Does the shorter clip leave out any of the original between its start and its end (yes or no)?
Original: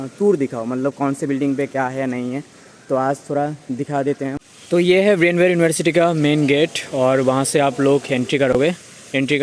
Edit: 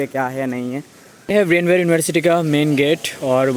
yes